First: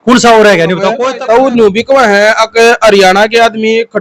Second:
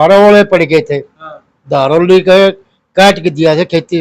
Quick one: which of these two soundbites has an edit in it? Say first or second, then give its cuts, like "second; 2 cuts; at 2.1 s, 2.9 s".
first; 1 cut; at 1.1 s